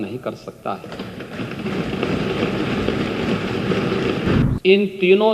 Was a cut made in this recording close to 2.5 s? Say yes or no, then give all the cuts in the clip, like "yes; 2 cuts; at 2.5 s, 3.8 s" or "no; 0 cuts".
no; 1 cut; at 4.4 s